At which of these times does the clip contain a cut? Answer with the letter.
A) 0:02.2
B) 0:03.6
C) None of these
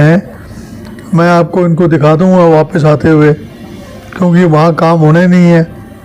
C